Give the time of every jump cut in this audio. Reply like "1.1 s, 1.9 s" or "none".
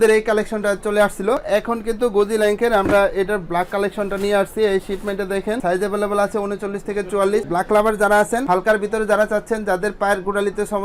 1.4 s, 5.6 s, 7.5 s